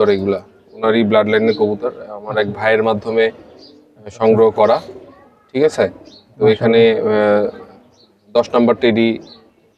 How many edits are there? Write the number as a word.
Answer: zero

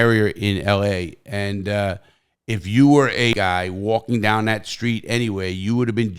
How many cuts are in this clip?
one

